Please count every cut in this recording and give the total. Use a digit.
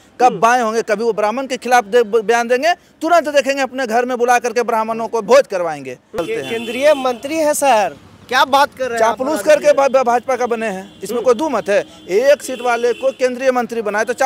1